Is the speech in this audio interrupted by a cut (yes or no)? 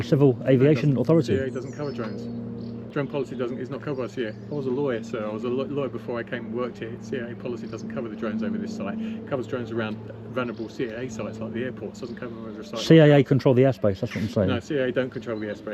yes